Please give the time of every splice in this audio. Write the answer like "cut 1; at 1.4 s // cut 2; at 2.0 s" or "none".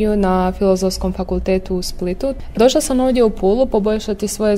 cut 1; at 2.5 s

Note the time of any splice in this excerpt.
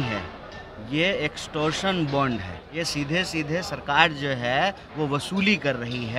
cut 1; at 2.6 s

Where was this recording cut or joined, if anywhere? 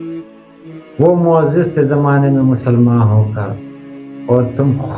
cut 1; at 0.9 s

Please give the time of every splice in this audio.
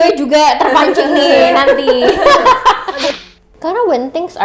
cut 1; at 3.2 s

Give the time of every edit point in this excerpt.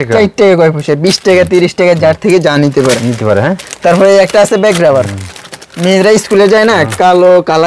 none

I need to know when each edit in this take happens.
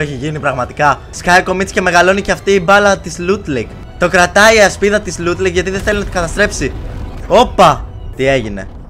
cut 1; at 1.1 s // cut 2; at 3.8 s // cut 3; at 8.0 s

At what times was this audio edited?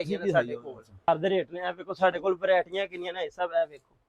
cut 1; at 1.1 s

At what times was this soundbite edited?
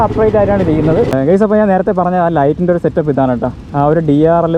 cut 1; at 1.1 s

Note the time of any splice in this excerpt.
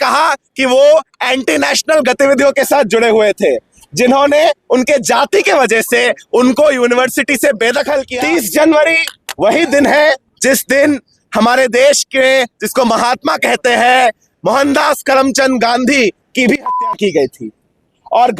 cut 1; at 8.1 s

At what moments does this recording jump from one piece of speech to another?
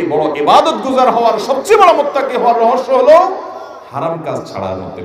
none

